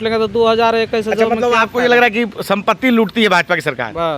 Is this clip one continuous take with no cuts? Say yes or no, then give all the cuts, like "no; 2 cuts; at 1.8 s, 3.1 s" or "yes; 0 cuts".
yes; 0 cuts